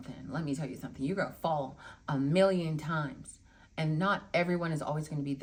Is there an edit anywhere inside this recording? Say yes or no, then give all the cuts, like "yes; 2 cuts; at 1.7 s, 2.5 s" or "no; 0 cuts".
no; 0 cuts